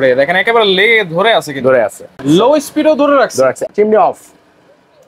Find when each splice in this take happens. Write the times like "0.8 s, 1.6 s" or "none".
2.1 s, 3.6 s